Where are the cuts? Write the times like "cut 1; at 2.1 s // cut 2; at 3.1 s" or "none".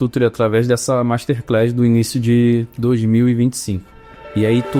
none